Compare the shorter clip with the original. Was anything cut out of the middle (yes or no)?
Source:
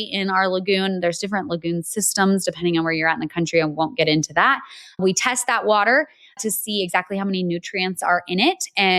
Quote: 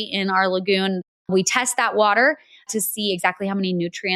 yes